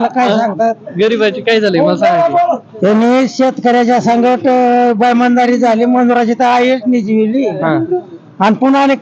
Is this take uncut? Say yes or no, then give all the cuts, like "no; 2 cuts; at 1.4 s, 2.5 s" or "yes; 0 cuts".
yes; 0 cuts